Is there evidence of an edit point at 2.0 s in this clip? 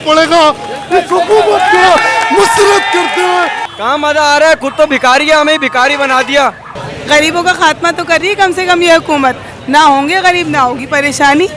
no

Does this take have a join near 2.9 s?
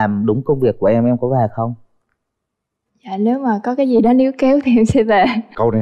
no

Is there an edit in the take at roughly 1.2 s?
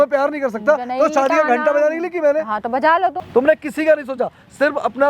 no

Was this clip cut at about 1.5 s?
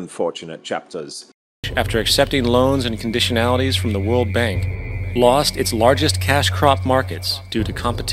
yes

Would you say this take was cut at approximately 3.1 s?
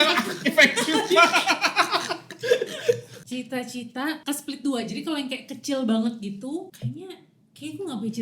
yes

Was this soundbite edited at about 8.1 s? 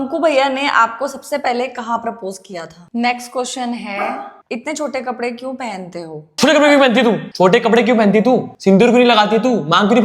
no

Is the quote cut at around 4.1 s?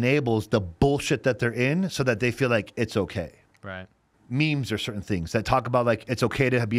yes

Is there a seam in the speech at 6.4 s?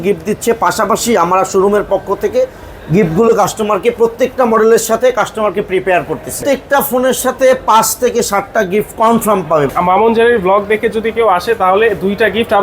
yes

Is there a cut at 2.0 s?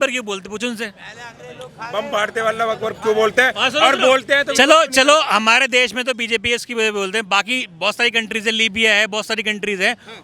no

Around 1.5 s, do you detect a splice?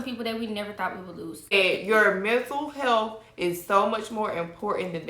yes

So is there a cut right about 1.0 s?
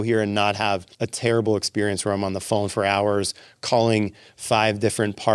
yes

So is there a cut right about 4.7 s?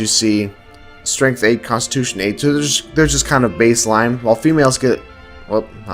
no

